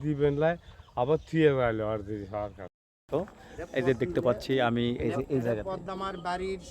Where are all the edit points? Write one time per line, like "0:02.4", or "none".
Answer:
0:03.0